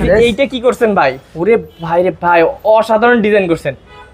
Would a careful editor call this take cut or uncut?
uncut